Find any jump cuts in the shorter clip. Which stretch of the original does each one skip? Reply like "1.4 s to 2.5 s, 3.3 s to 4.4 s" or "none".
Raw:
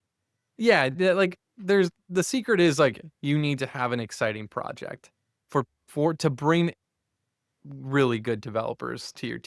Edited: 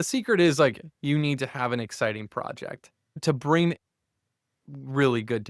5.4 s to 6.2 s